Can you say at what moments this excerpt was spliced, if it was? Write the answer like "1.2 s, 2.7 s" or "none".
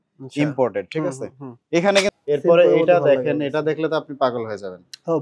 2.1 s